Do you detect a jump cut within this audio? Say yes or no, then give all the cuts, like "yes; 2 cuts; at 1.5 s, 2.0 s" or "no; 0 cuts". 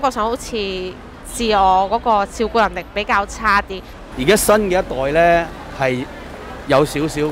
yes; 1 cut; at 3.9 s